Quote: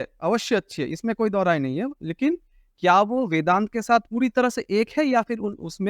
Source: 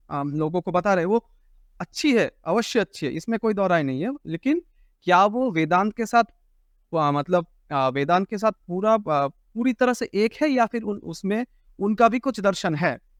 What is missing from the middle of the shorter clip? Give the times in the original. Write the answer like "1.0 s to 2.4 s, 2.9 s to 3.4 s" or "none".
6.3 s to 9.5 s